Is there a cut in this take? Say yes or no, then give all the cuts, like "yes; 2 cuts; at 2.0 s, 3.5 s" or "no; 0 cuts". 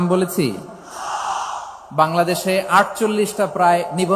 no; 0 cuts